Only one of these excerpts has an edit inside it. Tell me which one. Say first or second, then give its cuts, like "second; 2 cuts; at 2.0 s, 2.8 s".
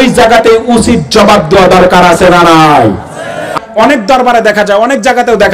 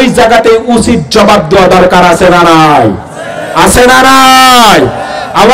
first; 1 cut; at 3.6 s